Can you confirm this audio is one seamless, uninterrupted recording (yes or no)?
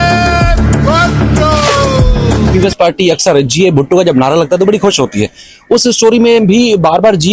no